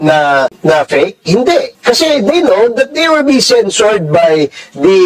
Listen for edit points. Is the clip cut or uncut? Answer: uncut